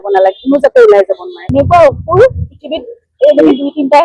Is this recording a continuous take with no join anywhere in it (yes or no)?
no